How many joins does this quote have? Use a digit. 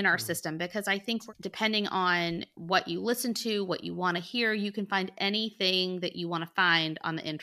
2